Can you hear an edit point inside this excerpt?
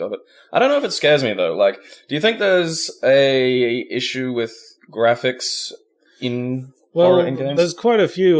no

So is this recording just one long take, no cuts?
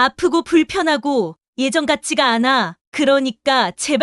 yes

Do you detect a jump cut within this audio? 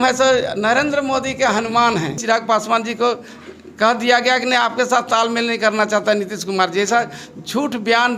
yes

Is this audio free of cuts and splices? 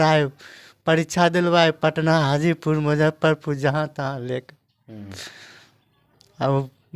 yes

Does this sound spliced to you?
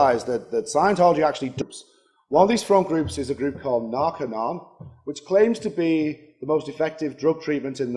no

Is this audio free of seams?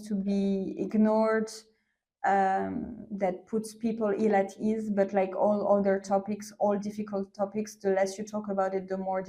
yes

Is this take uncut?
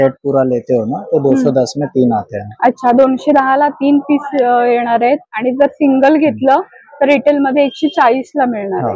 yes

